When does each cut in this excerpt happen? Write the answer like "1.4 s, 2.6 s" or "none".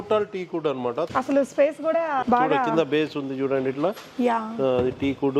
1.1 s